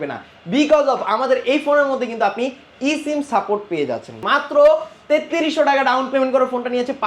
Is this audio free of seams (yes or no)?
no